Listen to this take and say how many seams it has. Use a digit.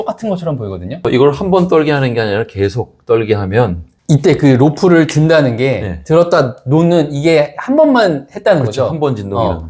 2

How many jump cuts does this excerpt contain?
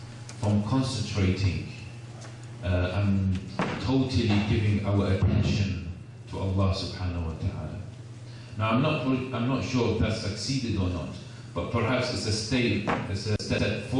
1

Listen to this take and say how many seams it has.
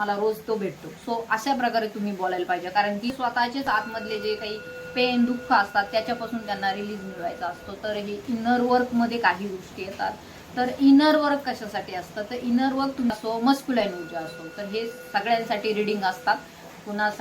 2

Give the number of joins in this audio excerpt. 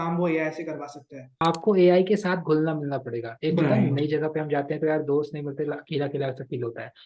1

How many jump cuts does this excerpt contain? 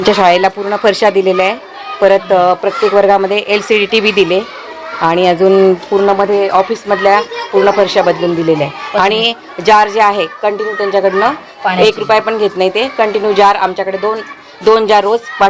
0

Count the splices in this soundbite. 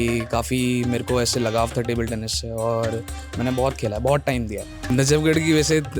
1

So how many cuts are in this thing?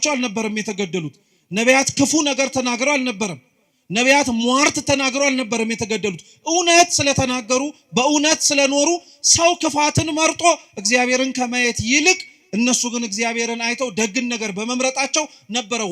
0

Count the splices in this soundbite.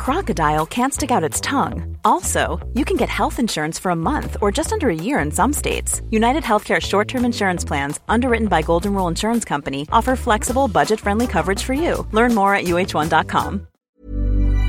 1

